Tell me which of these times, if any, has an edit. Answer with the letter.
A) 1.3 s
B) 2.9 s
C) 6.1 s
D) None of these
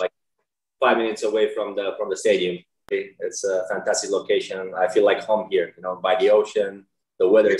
B